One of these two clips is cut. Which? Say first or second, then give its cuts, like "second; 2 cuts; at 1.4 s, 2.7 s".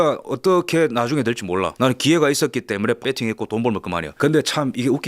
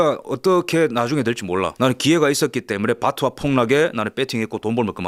first; 1 cut; at 3.0 s